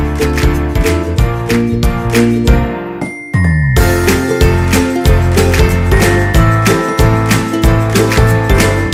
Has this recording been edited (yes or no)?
no